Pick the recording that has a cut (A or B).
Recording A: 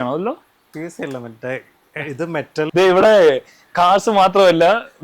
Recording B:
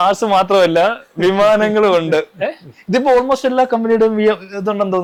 A